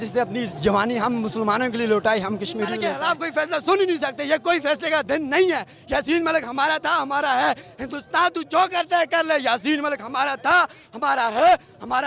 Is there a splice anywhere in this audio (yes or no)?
yes